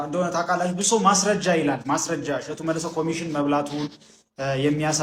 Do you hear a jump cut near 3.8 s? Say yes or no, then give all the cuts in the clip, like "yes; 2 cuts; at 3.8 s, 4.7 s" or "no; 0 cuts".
no; 0 cuts